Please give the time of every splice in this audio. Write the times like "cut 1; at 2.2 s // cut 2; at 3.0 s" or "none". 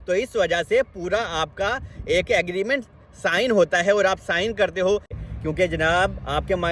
cut 1; at 5.2 s